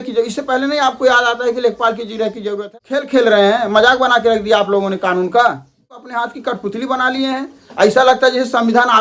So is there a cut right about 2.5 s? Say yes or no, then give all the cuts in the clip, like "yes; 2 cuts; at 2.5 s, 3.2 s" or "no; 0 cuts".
yes; 2 cuts; at 2.5 s, 6.2 s